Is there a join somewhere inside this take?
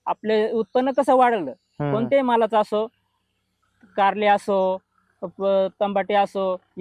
no; 0 cuts

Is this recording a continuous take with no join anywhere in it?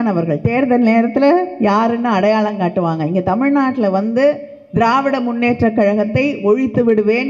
yes; 0 cuts

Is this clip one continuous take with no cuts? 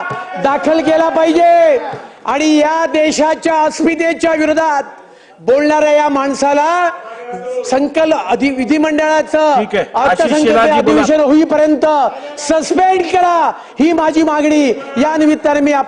yes; 0 cuts

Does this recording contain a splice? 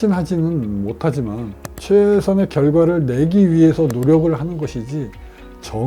yes; 1 cut; at 1.6 s

